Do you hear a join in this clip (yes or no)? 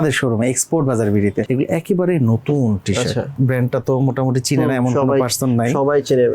yes